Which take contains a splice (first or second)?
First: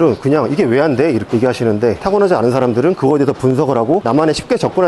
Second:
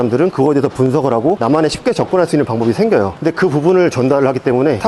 first